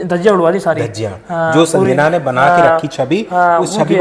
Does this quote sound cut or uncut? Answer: uncut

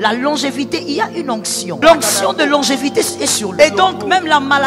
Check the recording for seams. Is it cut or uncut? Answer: cut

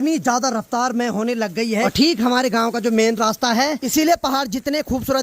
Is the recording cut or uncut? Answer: cut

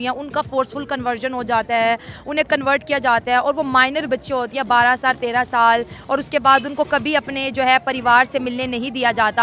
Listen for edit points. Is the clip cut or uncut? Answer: uncut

